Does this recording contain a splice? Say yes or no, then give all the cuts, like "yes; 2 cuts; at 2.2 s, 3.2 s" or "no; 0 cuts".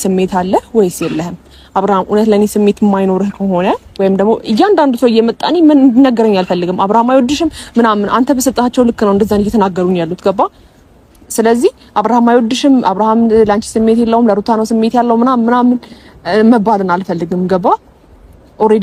no; 0 cuts